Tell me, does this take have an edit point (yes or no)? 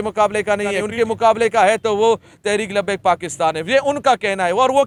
no